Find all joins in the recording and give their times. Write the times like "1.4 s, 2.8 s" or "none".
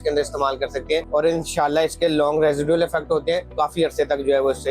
1.1 s, 3.5 s